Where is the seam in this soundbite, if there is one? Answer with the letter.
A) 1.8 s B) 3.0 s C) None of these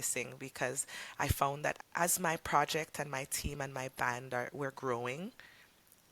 A